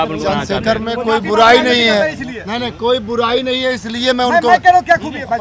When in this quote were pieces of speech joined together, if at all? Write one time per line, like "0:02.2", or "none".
none